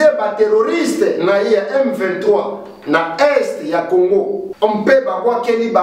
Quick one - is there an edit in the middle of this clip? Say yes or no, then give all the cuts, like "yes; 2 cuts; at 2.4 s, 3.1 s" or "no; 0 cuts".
yes; 1 cut; at 4.4 s